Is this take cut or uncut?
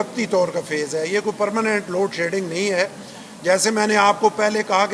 uncut